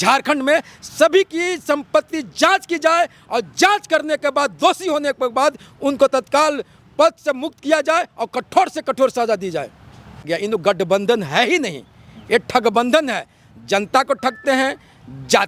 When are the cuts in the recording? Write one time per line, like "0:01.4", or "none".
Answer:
0:10.3